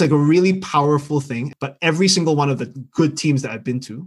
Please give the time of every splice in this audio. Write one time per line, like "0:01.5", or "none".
0:01.4